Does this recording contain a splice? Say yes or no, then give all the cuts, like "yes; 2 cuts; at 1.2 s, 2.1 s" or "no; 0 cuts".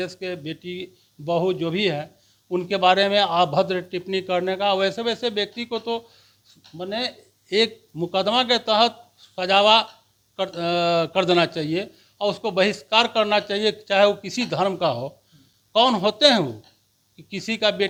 no; 0 cuts